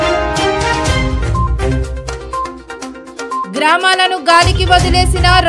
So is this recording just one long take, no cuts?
no; 1 cut; at 3.3 s

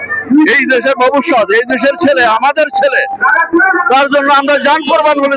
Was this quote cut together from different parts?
no; 0 cuts

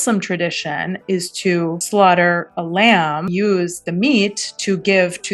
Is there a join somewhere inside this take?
yes; 1 cut; at 3.3 s

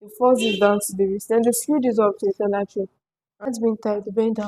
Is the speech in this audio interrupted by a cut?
yes; 1 cut; at 3.5 s

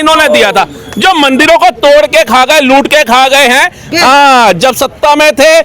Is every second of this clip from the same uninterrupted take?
no; 1 cut; at 3.9 s

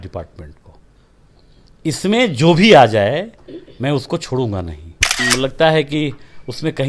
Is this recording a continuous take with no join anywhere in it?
no; 1 cut; at 5.2 s

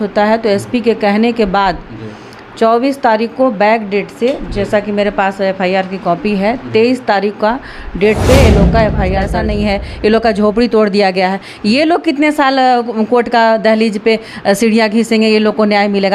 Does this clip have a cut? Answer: yes; 1 cut; at 9.4 s

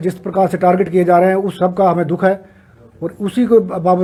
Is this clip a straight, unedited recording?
yes; 0 cuts

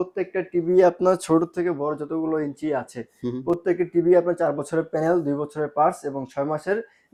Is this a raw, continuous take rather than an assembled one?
yes; 0 cuts

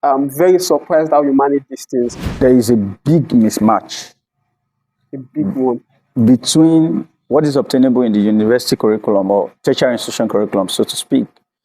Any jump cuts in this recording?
yes; 1 cut; at 2.3 s

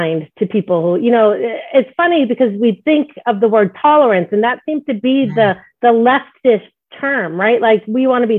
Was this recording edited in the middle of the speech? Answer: no; 0 cuts

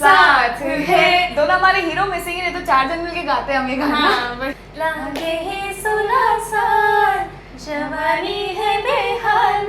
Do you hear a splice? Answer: yes; 1 cut; at 4.6 s

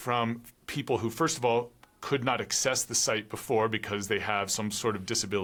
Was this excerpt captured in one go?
yes; 0 cuts

